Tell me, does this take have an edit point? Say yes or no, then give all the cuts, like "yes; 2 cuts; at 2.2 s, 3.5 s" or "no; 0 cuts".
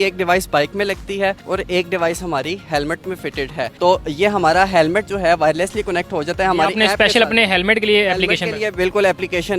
no; 0 cuts